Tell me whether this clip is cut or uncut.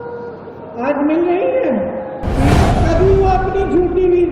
cut